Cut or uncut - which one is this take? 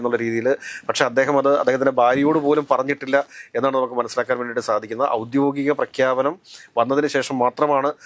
uncut